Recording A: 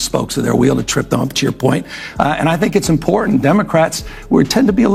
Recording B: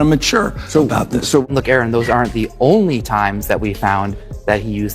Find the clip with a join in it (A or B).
B